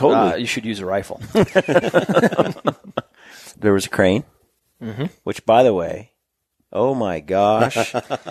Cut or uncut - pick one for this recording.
cut